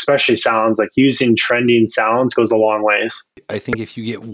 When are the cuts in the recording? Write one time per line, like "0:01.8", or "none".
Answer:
0:03.4